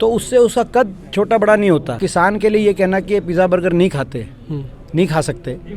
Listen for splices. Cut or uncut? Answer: cut